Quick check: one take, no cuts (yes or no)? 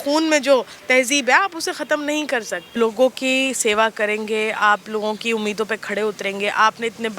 no